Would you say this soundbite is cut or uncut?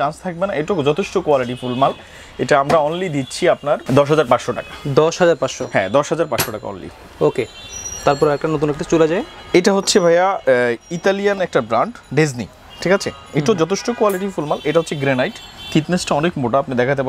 uncut